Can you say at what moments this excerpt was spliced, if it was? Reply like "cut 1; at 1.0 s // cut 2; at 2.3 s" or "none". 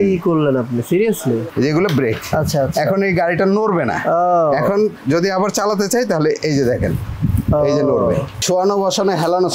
cut 1; at 1.5 s // cut 2; at 8.4 s